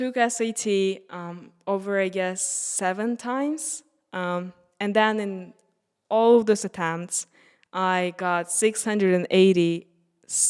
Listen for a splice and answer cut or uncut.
uncut